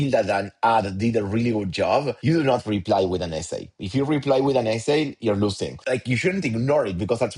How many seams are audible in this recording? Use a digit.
1